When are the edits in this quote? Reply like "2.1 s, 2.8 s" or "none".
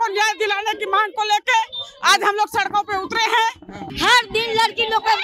3.8 s